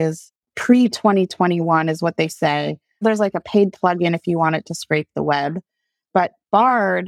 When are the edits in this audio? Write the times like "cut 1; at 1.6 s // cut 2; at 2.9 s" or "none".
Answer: cut 1; at 3.0 s

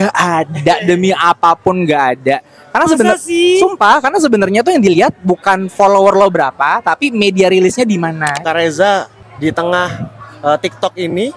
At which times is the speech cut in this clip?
cut 1; at 8.4 s // cut 2; at 9.2 s

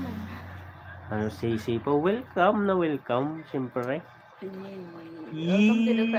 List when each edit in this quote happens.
none

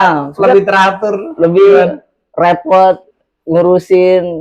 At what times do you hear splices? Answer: none

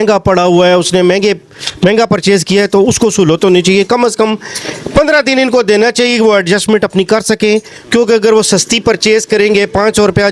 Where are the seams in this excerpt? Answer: none

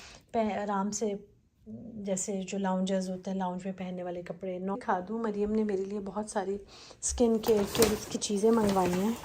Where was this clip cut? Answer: cut 1; at 4.8 s

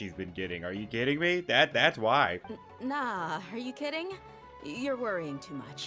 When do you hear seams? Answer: cut 1; at 2.5 s

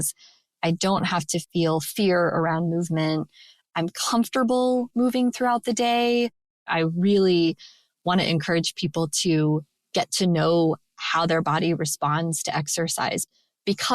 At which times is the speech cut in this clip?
cut 1; at 1.5 s // cut 2; at 4.9 s // cut 3; at 6.6 s

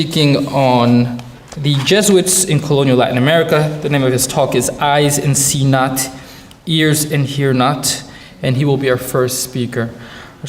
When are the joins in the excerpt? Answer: cut 1; at 4.5 s

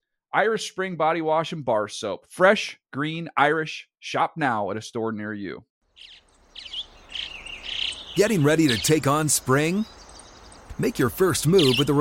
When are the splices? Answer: cut 1; at 5.7 s

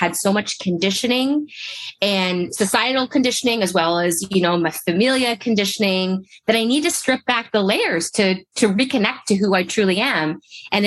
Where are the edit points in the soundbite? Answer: cut 1; at 2.5 s

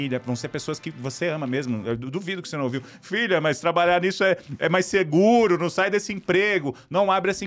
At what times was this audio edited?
none

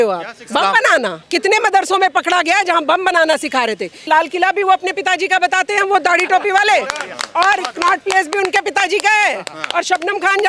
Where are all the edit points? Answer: cut 1; at 1.2 s // cut 2; at 4.1 s

